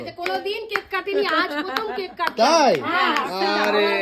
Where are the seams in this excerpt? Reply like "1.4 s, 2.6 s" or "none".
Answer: none